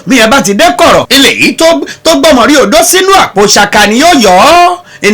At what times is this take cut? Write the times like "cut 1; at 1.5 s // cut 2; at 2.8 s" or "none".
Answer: cut 1; at 1.1 s